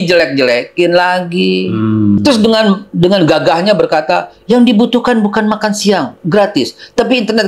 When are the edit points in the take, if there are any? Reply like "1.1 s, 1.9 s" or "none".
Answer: 2.2 s